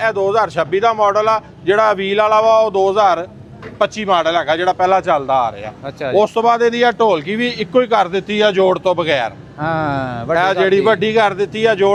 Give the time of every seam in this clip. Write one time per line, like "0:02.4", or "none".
none